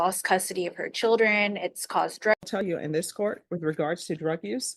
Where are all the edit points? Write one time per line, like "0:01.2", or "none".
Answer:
0:02.3